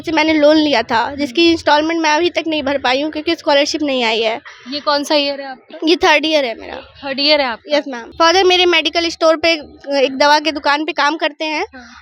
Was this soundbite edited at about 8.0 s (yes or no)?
yes